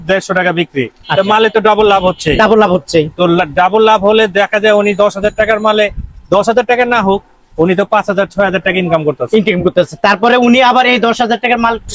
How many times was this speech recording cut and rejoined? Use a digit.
0